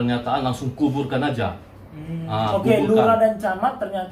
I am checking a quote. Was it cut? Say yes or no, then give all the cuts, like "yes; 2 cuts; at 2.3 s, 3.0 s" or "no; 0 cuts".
no; 0 cuts